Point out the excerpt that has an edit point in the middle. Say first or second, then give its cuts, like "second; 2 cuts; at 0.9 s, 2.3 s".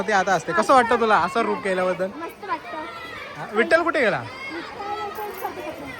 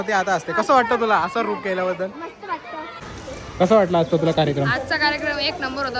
second; 1 cut; at 3.1 s